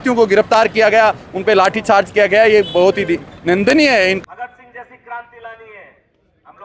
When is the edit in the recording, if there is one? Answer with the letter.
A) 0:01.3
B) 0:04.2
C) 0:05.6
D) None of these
B